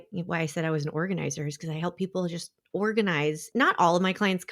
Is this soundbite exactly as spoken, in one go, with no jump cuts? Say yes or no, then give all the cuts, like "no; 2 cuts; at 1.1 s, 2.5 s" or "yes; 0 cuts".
no; 1 cut; at 3.4 s